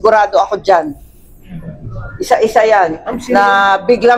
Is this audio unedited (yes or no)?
no